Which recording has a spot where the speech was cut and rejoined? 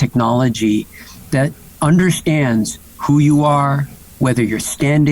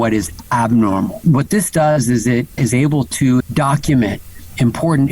second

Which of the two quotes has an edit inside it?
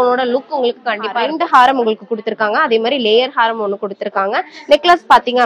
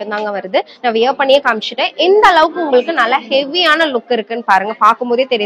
first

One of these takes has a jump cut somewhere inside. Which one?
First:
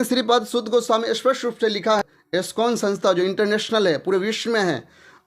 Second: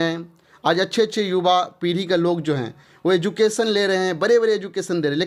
first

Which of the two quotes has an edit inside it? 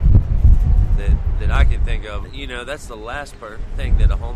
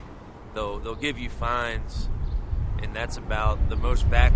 first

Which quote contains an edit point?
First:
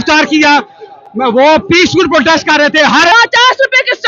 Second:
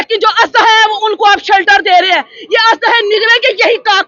first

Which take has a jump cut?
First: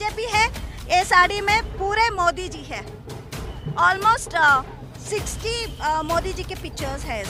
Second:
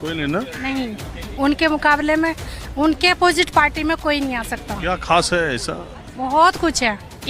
second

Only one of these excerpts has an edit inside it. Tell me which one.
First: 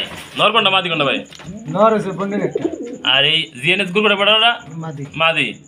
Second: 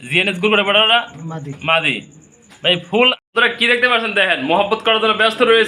second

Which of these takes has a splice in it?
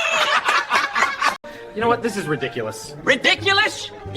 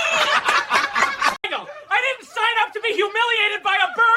first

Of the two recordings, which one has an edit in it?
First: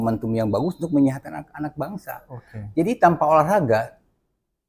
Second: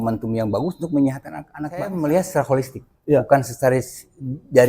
second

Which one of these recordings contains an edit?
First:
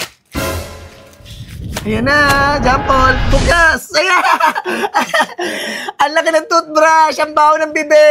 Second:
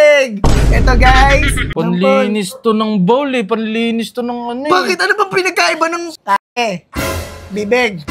second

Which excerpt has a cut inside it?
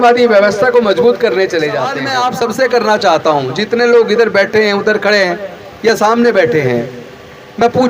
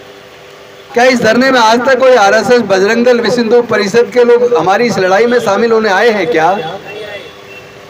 first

